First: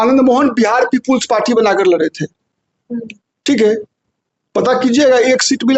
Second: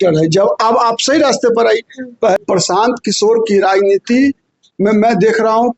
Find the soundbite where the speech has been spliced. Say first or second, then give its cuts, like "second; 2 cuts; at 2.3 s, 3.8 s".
second; 1 cut; at 2.4 s